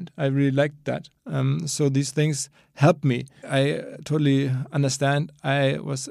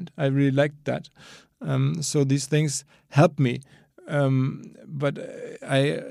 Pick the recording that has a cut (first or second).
first